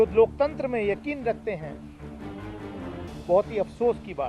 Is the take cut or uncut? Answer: uncut